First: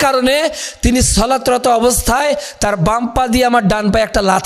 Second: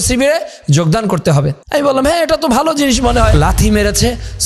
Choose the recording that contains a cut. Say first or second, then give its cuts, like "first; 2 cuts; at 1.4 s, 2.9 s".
second; 2 cuts; at 1.6 s, 3.3 s